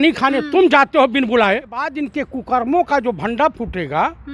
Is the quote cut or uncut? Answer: cut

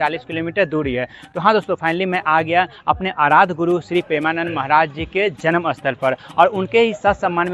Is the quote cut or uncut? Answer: uncut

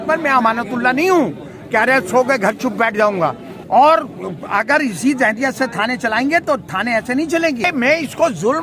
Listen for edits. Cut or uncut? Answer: cut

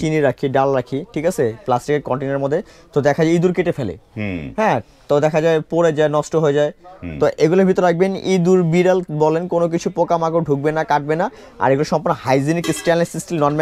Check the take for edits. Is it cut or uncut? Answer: uncut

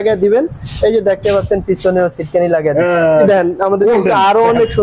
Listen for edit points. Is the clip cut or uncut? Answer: cut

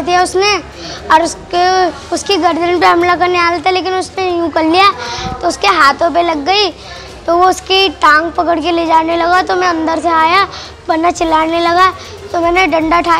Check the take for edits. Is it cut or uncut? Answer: uncut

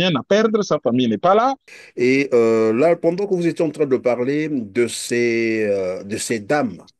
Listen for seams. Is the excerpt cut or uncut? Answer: cut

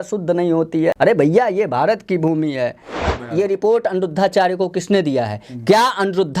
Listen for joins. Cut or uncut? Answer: cut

